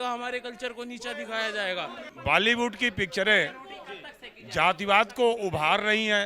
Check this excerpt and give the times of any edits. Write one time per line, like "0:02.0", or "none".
0:02.0